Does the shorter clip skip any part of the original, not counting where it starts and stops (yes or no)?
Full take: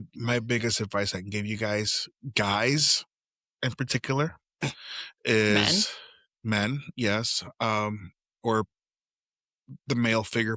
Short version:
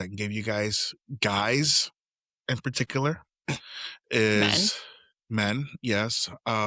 no